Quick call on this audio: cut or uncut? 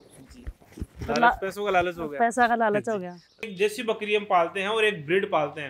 cut